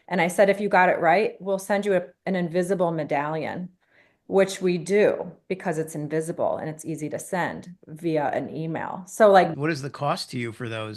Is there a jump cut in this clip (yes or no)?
yes